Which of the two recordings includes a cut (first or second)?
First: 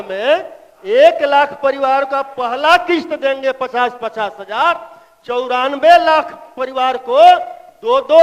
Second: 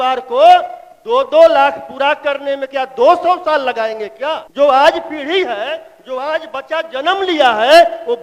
second